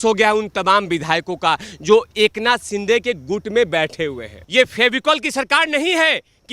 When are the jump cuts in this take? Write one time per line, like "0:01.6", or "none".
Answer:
0:04.3